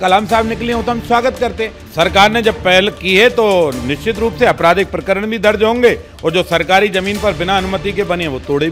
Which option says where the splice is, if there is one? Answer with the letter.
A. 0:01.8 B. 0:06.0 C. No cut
A